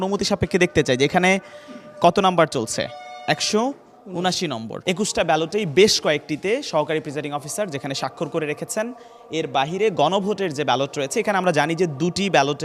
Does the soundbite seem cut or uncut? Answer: cut